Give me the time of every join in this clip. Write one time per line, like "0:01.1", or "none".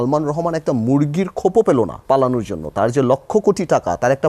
0:02.0